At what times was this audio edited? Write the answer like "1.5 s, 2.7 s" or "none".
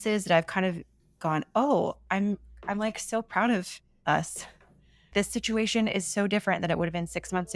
5.1 s